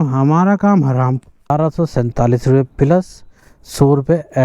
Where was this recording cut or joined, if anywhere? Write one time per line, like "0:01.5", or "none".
0:01.5